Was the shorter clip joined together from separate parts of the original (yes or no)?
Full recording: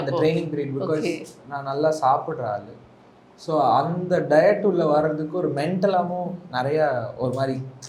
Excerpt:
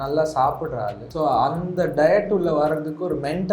yes